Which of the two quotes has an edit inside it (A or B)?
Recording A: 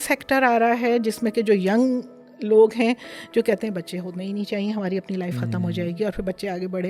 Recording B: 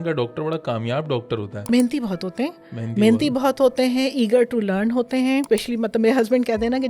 B